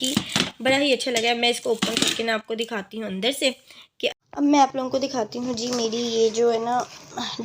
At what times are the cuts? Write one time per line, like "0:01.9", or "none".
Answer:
0:04.1